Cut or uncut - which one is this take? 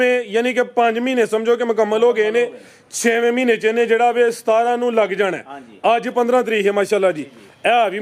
uncut